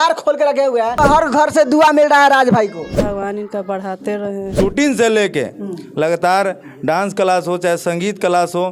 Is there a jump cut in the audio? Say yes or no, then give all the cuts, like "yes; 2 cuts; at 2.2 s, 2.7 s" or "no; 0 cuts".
yes; 3 cuts; at 1.0 s, 3.0 s, 4.5 s